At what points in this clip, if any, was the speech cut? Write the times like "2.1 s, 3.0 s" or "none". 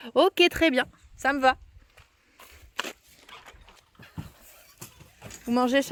none